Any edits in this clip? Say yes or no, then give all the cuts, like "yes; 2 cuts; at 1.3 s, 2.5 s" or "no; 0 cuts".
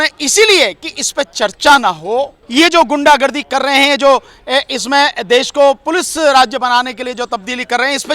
yes; 1 cut; at 2.4 s